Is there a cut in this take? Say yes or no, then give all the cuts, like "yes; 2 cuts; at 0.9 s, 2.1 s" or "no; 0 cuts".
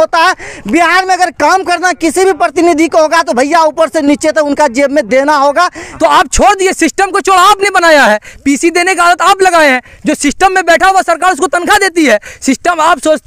yes; 1 cut; at 6.0 s